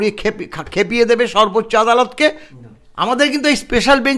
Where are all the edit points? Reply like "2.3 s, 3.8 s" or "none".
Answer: 2.5 s